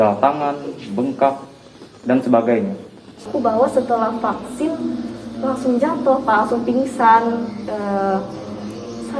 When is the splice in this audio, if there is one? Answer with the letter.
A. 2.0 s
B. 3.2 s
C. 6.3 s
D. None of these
B